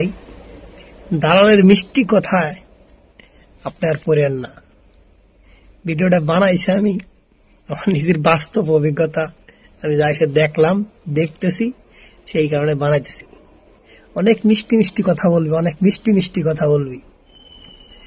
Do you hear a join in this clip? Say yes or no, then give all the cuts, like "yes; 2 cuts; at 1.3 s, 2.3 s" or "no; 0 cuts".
no; 0 cuts